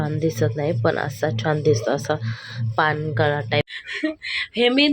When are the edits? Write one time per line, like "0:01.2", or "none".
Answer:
0:03.6